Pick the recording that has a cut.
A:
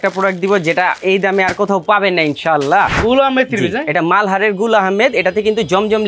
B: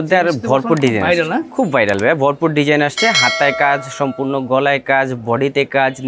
A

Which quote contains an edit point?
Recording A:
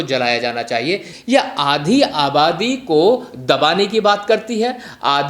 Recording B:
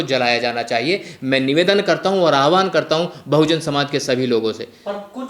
A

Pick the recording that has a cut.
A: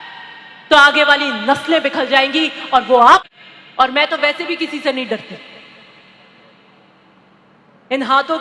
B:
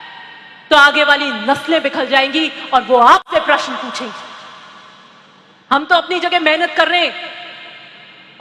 A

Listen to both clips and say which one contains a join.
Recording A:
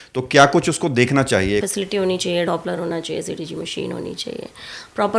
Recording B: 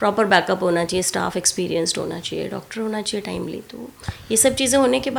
A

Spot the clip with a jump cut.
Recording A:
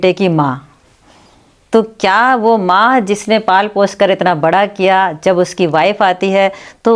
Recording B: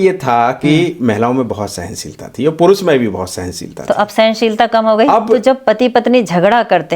B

